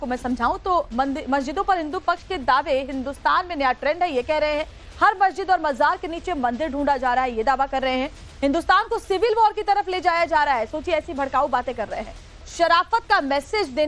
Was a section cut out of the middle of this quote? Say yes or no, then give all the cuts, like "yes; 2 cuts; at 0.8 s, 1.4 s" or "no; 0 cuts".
yes; 1 cut; at 12.7 s